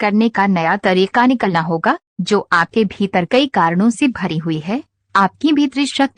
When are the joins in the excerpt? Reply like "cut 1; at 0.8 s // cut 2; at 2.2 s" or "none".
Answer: none